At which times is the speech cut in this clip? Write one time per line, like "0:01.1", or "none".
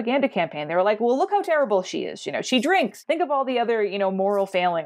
none